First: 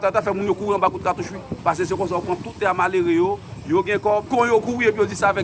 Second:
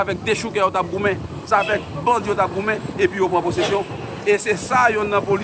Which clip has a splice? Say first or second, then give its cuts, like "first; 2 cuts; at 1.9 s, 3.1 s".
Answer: first; 2 cuts; at 1.5 s, 4.3 s